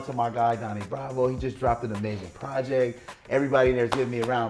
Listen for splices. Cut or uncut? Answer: uncut